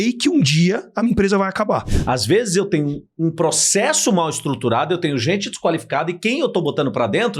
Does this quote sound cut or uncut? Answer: cut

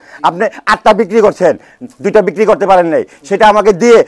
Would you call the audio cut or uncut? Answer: uncut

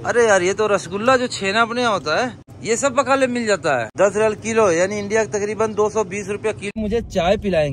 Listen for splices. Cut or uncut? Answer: cut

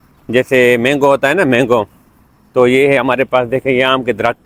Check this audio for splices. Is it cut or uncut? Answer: uncut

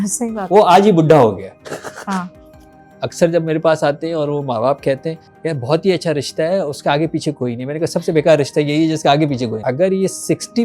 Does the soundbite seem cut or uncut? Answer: cut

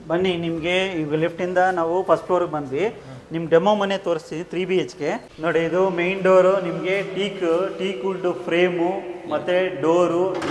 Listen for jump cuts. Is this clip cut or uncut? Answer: uncut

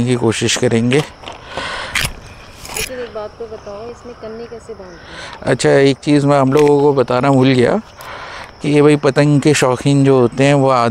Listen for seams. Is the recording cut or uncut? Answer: uncut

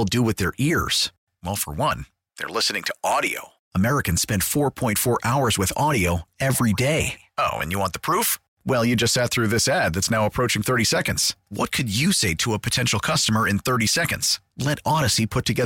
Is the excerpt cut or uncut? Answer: uncut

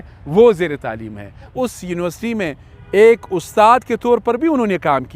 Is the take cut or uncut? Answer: cut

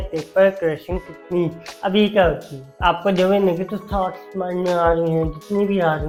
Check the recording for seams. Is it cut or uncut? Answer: uncut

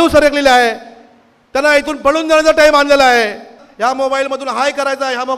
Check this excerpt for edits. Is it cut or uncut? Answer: cut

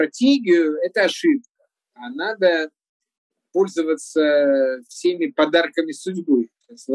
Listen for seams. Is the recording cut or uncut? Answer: uncut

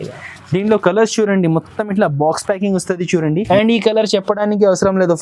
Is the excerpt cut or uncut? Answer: cut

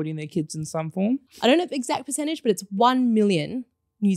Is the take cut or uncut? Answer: cut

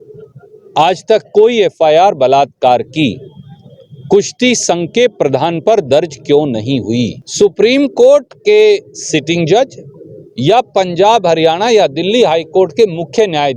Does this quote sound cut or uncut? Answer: cut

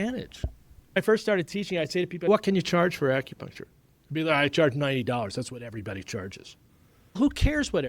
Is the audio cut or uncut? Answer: cut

